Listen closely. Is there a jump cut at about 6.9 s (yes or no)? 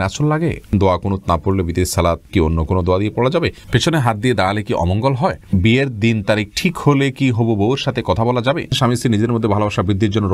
no